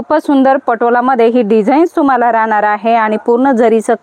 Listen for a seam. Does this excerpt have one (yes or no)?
no